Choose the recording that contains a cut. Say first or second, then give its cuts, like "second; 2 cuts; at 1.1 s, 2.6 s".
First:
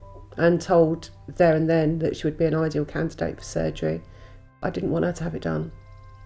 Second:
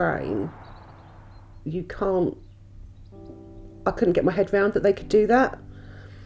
first; 1 cut; at 4.3 s